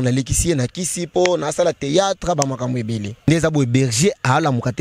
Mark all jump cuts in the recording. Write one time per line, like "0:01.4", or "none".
0:03.1